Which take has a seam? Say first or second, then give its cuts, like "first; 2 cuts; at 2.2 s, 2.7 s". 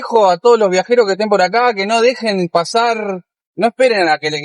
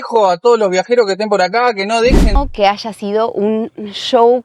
second; 1 cut; at 2.4 s